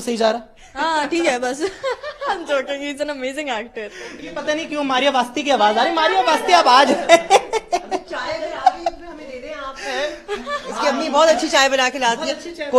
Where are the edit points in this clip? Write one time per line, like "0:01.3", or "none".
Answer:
0:04.0

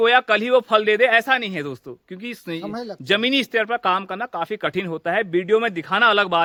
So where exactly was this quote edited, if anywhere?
none

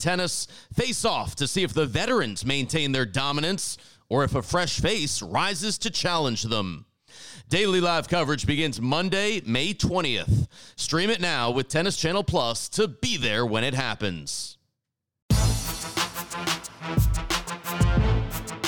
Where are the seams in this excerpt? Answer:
0:15.3

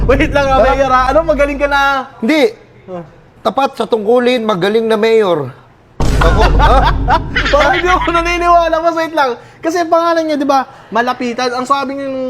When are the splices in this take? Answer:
none

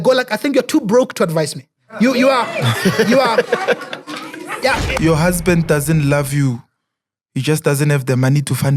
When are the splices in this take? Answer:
0:04.9

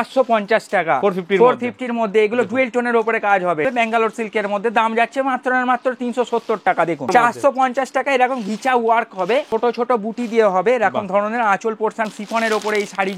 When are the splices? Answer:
0:03.7
0:07.1
0:09.5
0:12.1

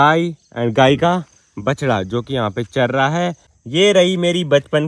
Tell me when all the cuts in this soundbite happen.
0:03.5

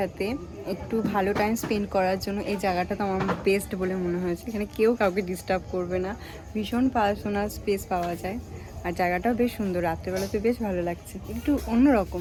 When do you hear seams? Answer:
none

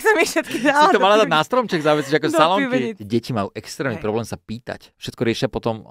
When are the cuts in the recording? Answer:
0:03.0
0:05.0

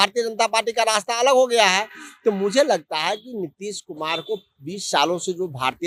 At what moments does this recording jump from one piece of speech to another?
none

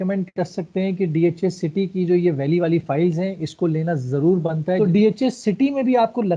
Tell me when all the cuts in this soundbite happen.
0:04.8

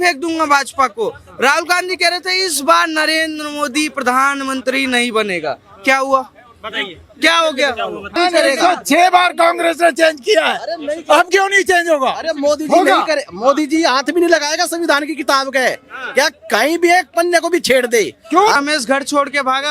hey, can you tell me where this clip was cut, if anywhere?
0:08.2
0:18.5

